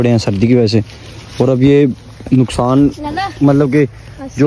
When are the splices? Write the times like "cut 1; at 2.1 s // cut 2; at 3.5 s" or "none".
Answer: none